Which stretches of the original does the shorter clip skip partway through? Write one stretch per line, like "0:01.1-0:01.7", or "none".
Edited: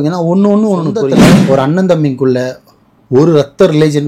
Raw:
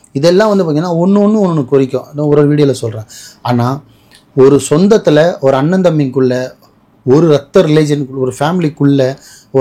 0:02.0-0:05.2